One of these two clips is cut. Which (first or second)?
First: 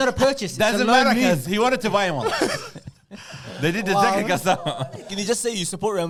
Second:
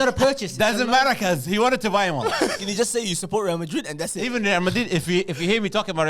second